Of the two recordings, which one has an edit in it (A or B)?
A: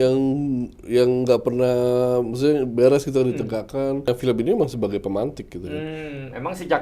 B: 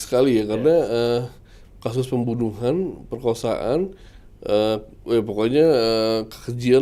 A